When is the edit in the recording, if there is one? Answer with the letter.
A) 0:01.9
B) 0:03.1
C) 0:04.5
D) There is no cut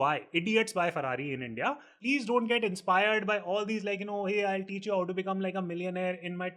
A